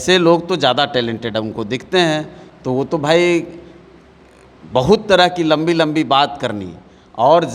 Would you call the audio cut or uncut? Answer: uncut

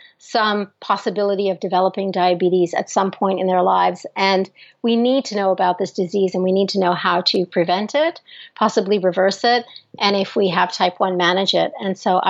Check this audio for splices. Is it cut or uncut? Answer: uncut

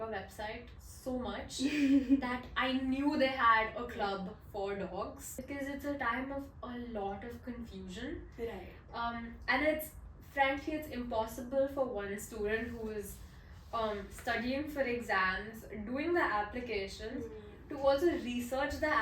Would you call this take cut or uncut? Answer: cut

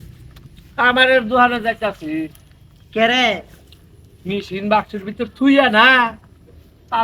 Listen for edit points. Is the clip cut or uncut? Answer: uncut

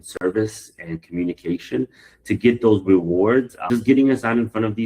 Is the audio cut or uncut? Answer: cut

